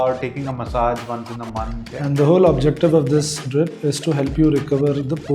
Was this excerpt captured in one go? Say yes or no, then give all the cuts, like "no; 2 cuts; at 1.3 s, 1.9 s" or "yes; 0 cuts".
no; 1 cut; at 1.8 s